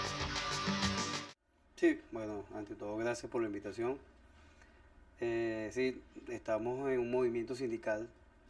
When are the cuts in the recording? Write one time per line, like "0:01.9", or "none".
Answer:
none